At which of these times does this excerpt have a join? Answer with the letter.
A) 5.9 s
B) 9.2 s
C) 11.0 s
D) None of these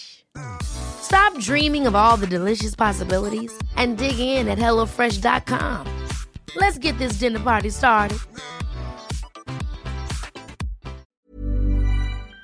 C